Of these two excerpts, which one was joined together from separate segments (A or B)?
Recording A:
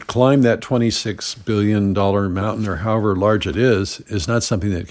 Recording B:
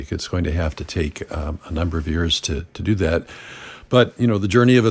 A